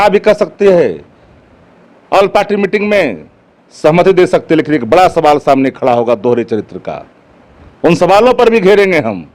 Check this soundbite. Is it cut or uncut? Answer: uncut